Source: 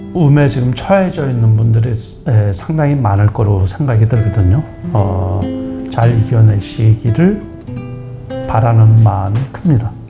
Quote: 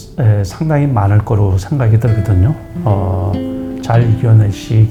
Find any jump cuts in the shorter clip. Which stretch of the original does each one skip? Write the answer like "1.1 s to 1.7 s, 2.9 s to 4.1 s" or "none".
none